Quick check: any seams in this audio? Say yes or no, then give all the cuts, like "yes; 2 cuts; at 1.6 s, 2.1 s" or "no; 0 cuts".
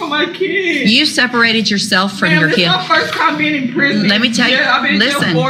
no; 0 cuts